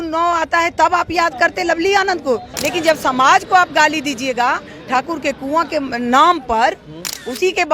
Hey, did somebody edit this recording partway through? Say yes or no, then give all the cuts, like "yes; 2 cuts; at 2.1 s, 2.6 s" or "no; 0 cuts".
yes; 1 cut; at 2.5 s